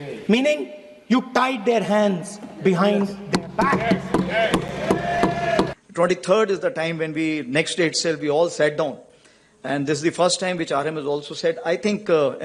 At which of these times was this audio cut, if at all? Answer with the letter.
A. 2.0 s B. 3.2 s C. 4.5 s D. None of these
D